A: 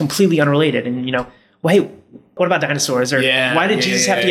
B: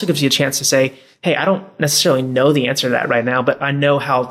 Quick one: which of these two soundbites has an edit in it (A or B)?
A